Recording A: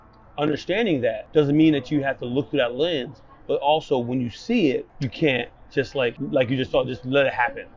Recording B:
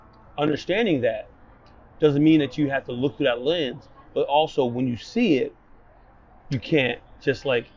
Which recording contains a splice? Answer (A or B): A